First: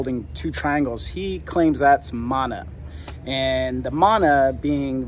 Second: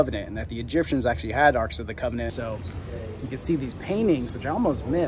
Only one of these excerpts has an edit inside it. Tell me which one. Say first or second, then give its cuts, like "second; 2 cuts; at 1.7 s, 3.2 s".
second; 1 cut; at 2.3 s